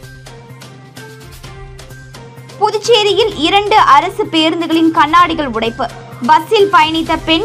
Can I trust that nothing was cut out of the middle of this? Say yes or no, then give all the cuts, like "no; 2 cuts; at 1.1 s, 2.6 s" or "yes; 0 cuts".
no; 1 cut; at 1.4 s